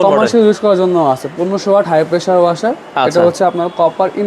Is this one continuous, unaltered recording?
yes; 0 cuts

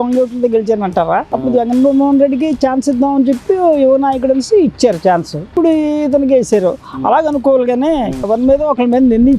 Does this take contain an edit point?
yes; 2 cuts; at 5.5 s, 8.3 s

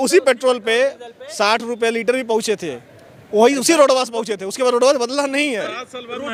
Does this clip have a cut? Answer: no; 0 cuts

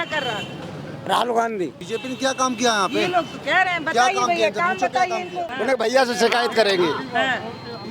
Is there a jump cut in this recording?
yes; 2 cuts; at 1.8 s, 5.4 s

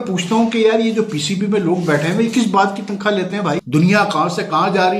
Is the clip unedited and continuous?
no; 1 cut; at 3.6 s

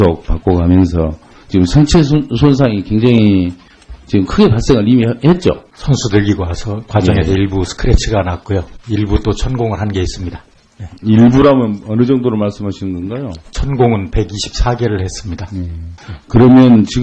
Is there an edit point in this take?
no; 0 cuts

